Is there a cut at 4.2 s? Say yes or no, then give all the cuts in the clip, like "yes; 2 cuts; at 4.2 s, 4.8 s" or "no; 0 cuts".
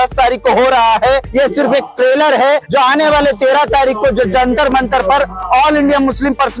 no; 0 cuts